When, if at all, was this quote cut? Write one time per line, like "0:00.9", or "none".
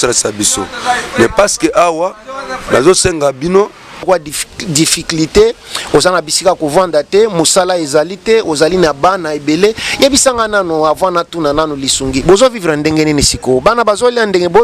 0:04.1